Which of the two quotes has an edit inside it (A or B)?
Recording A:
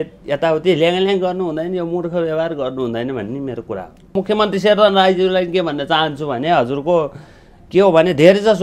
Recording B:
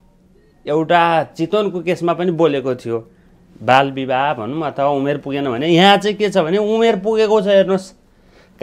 A